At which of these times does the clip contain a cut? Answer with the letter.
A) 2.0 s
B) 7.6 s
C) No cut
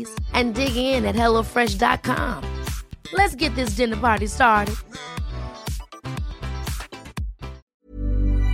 B